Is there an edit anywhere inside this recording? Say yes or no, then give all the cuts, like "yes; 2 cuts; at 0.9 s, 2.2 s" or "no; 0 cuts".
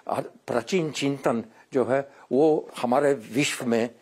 yes; 1 cut; at 2.7 s